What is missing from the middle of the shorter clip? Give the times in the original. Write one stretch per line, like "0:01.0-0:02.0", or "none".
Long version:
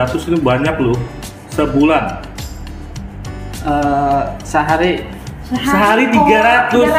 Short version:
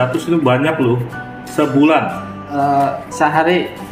0:02.5-0:03.9